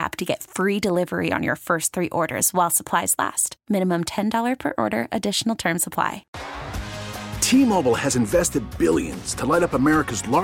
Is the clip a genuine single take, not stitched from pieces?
no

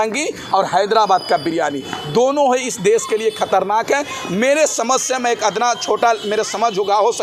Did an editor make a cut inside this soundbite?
no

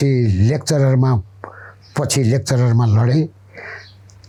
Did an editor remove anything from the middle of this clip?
no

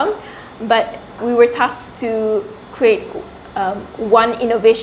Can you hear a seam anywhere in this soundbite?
yes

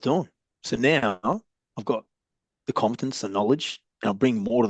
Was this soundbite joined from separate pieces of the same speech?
no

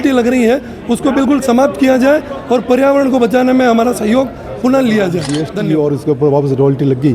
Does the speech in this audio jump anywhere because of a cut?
yes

